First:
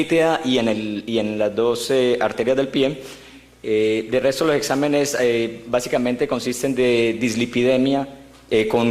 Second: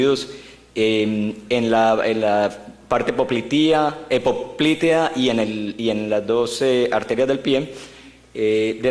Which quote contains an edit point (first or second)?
first